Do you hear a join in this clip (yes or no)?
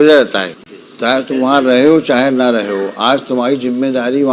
yes